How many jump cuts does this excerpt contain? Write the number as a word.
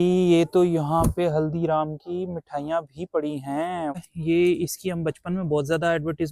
one